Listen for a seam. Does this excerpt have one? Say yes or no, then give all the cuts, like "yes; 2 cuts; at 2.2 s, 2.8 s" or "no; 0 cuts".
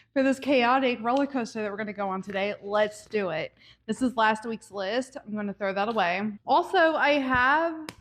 no; 0 cuts